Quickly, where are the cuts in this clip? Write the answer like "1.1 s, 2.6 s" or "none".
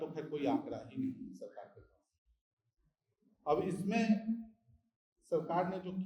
none

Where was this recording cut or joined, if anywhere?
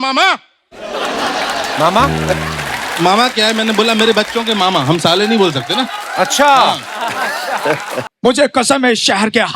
8.1 s

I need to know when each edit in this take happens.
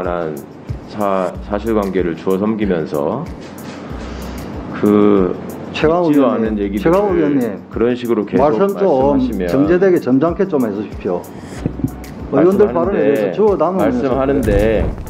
none

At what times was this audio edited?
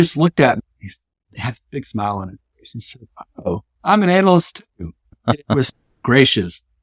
none

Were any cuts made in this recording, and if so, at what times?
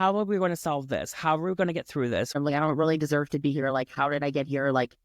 2.3 s

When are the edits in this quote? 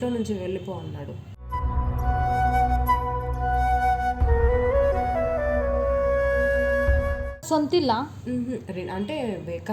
none

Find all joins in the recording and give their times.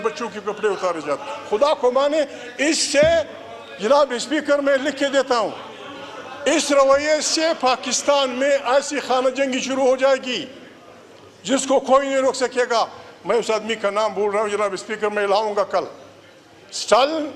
none

